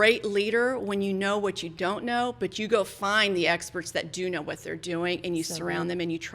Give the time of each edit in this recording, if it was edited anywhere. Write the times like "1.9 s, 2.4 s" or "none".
none